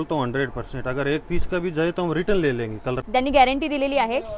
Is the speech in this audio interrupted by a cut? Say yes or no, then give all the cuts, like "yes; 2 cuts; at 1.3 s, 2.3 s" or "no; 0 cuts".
yes; 1 cut; at 3.0 s